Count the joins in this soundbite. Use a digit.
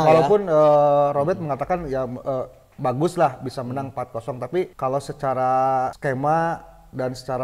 2